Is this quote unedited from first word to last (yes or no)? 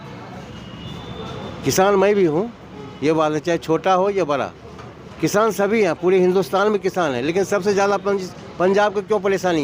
yes